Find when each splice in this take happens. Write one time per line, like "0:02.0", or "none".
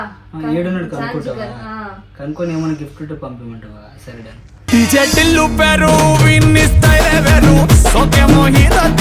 none